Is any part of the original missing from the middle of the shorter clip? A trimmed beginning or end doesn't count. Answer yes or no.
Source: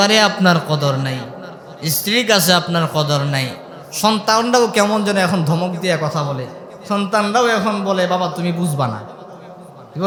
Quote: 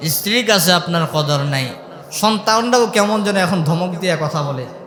no